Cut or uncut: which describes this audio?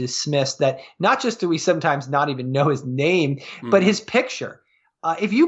uncut